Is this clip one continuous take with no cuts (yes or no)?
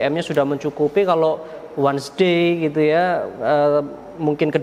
yes